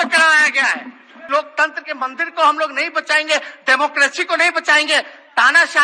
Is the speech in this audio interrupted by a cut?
yes; 1 cut; at 1.1 s

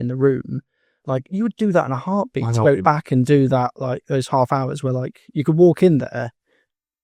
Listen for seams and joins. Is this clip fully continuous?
yes; 0 cuts

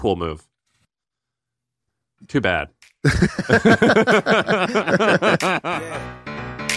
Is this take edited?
yes; 1 cut; at 5.8 s

